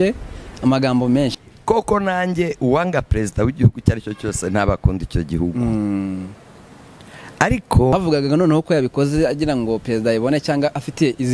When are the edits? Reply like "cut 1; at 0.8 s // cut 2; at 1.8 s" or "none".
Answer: cut 1; at 1.3 s // cut 2; at 7.9 s

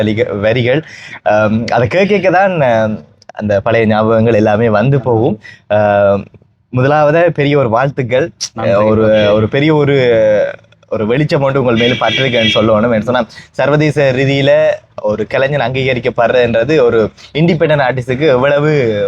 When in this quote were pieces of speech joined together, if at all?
none

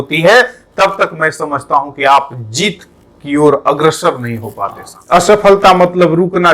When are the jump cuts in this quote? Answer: cut 1; at 4.9 s

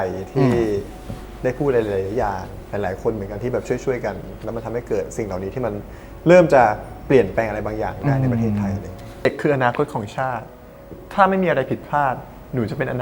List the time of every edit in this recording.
cut 1; at 9.3 s

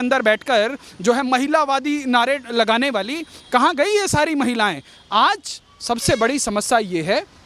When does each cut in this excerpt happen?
none

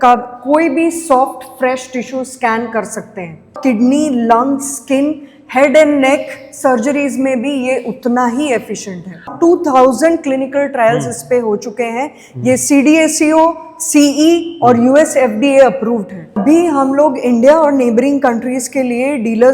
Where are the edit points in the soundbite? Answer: cut 1; at 3.6 s // cut 2; at 9.3 s // cut 3; at 16.4 s

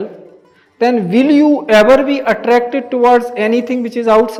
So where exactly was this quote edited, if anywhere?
none

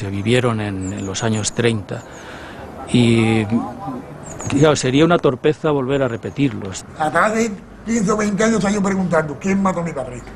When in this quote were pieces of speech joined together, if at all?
cut 1; at 8.9 s

